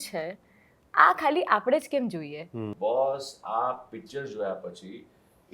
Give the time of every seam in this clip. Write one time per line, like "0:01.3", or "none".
0:02.7